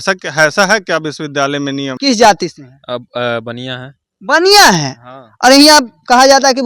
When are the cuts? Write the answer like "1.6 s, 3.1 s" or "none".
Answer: 1.9 s